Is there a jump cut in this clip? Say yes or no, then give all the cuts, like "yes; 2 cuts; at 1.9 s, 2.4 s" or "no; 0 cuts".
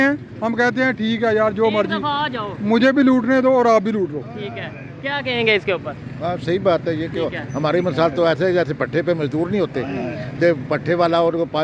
no; 0 cuts